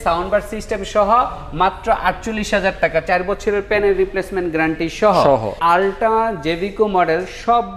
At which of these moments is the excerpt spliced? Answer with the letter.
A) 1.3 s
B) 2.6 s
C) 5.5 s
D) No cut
C